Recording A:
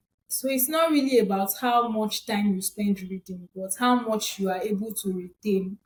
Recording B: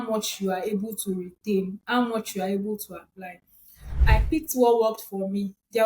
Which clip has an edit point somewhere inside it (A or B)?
B